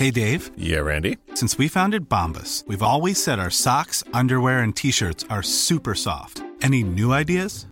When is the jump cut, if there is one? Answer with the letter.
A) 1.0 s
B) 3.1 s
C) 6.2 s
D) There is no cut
D